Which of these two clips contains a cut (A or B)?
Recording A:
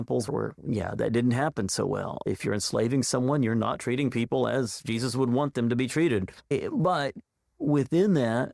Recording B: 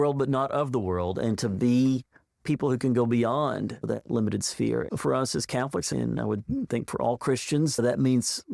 B